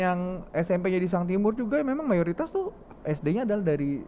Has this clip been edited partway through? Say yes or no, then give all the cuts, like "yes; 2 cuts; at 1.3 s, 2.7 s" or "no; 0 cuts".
yes; 1 cut; at 2.9 s